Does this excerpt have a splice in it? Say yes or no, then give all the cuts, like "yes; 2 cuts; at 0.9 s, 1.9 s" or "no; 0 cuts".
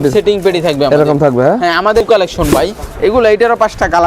yes; 1 cut; at 2.0 s